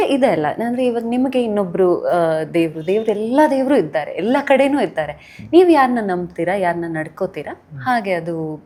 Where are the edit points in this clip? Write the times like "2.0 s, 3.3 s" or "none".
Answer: none